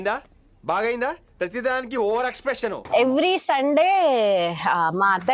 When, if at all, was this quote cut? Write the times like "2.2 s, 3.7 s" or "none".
2.8 s